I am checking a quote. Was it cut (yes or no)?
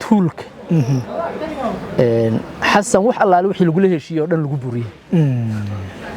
no